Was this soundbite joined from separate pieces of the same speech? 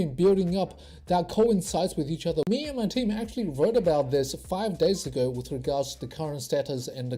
yes; 1 cut; at 2.5 s

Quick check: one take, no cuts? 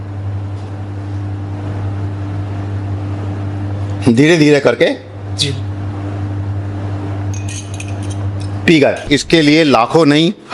no; 1 cut; at 9.1 s

